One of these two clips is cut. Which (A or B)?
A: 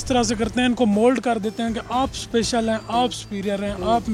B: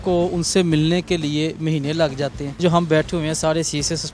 B